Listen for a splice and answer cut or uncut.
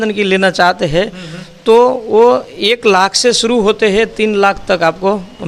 uncut